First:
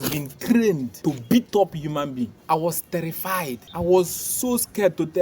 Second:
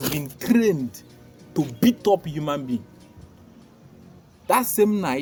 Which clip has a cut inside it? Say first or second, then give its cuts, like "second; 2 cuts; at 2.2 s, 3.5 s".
first; 3 cuts; at 0.9 s, 2.4 s, 3.6 s